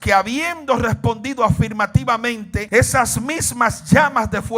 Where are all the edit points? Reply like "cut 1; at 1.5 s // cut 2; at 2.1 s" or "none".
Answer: cut 1; at 2.5 s